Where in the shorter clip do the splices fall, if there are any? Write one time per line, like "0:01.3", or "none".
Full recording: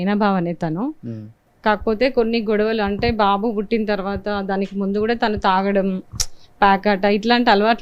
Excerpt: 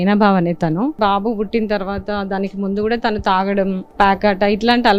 0:01.0
0:03.8